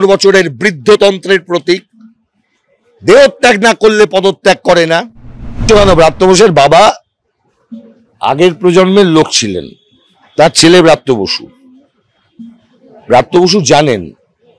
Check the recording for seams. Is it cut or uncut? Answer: cut